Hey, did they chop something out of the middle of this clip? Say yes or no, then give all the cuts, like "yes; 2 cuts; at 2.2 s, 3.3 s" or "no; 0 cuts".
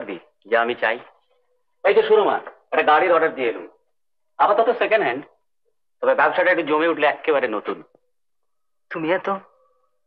no; 0 cuts